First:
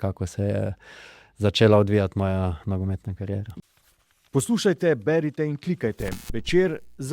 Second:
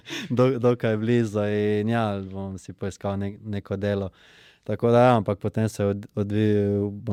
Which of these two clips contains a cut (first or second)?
first